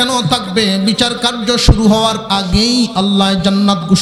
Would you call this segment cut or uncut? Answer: uncut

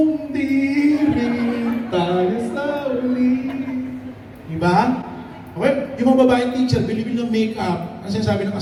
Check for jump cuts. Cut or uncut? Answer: uncut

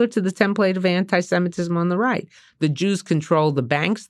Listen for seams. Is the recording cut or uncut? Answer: uncut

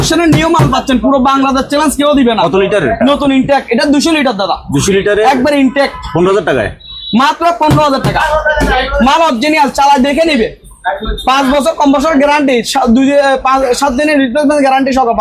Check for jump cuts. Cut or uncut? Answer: uncut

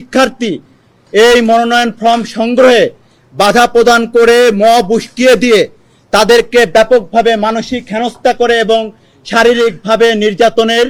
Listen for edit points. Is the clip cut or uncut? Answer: uncut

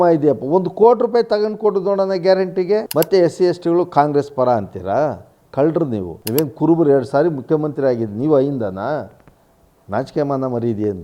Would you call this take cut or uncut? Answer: cut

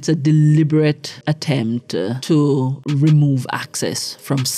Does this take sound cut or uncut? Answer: cut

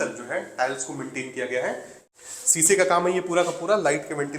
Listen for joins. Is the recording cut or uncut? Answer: cut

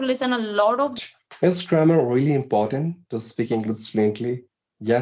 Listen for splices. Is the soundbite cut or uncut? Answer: cut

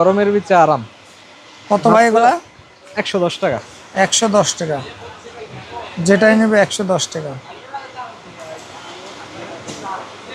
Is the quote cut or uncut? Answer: uncut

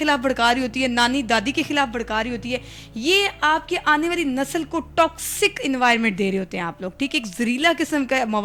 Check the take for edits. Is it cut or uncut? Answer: uncut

